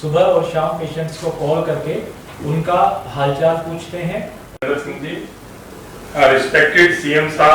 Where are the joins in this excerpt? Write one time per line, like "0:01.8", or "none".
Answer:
0:04.6